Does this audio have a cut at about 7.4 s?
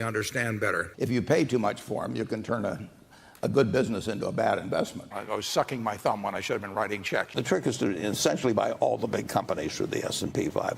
yes; 3 cuts; at 0.9 s, 5.1 s, 7.4 s

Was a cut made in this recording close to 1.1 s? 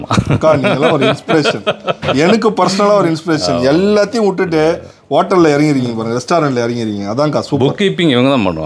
no; 0 cuts

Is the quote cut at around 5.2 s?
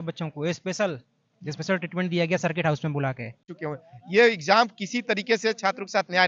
no; 1 cut; at 3.6 s

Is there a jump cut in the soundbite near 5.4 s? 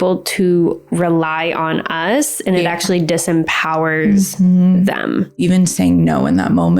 yes; 1 cut; at 5.4 s

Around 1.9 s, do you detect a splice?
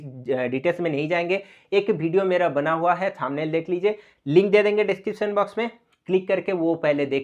no; 0 cuts

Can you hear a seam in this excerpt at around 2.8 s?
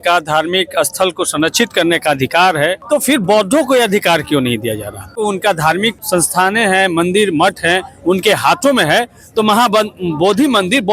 yes; 3 cuts; at 2.8 s, 5.2 s, 6.0 s

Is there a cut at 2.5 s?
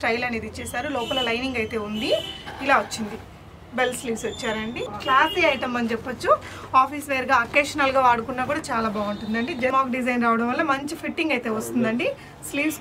no; 2 cuts; at 5.0 s, 9.7 s

